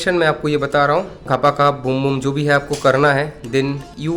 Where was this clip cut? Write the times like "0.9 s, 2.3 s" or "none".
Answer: 1.2 s